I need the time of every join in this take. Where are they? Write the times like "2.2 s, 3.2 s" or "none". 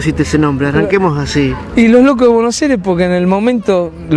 1.8 s